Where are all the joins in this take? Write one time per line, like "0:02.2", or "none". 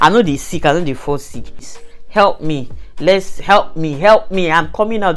0:01.7